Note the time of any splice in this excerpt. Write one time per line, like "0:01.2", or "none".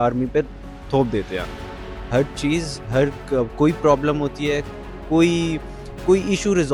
none